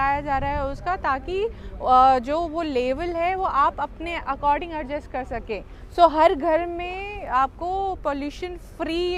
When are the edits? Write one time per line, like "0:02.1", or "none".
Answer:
none